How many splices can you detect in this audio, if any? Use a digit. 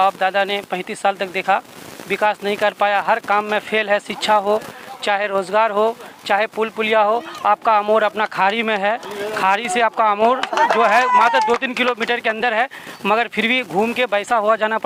0